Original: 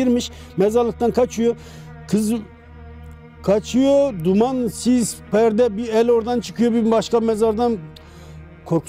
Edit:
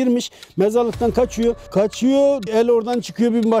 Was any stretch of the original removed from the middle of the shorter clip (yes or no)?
yes